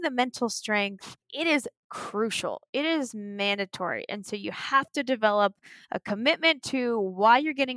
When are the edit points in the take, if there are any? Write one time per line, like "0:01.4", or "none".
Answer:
0:01.2